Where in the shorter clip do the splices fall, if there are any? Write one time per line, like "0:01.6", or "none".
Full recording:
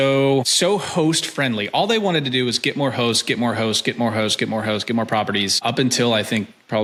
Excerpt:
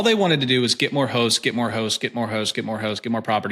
none